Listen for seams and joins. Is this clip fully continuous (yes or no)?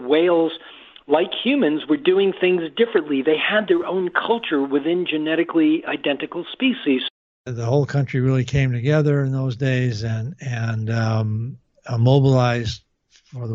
no